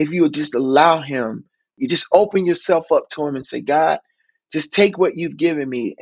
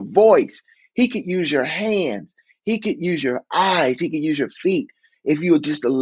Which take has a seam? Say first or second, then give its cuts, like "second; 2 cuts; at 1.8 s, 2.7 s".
first; 1 cut; at 1.7 s